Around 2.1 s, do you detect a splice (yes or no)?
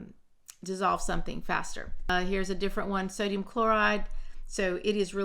yes